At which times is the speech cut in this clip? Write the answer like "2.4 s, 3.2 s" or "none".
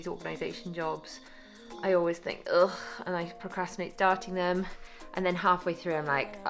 none